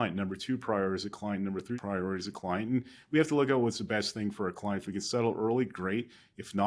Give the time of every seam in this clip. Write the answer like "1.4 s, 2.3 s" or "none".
1.8 s